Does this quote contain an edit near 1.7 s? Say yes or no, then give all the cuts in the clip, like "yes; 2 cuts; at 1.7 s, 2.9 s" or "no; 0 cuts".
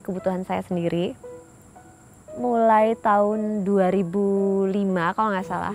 yes; 1 cut; at 1.7 s